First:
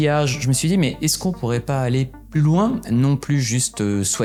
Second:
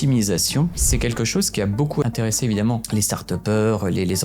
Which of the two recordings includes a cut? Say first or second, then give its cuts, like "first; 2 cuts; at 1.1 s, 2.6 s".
second; 3 cuts; at 0.9 s, 2.0 s, 2.8 s